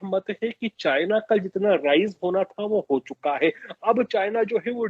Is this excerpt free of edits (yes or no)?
yes